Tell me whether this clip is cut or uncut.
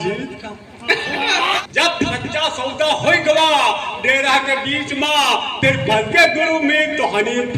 cut